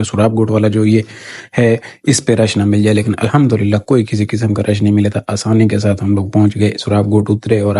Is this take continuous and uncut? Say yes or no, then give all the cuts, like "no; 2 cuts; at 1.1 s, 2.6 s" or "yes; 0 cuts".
yes; 0 cuts